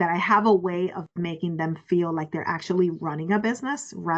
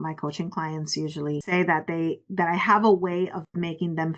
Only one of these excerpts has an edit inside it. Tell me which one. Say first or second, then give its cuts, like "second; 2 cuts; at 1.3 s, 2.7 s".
second; 1 cut; at 1.4 s